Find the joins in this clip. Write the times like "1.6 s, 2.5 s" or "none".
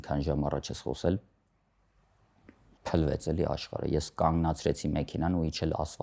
2.8 s